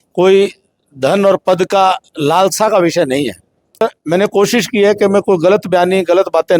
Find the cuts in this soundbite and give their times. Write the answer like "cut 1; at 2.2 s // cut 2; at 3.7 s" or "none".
cut 1; at 3.8 s